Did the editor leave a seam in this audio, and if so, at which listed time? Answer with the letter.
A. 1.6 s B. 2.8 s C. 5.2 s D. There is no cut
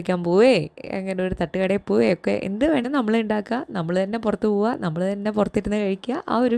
B